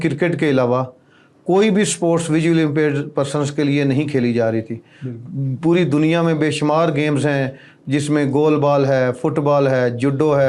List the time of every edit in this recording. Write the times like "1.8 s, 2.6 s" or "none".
none